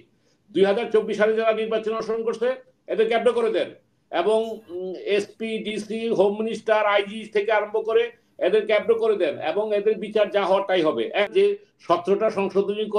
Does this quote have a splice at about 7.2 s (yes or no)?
no